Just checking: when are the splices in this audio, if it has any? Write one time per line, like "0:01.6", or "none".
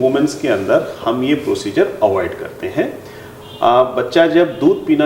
none